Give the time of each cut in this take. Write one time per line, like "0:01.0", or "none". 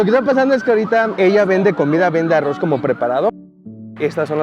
0:01.1
0:03.3